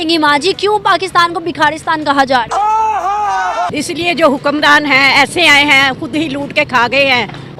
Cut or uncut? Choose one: uncut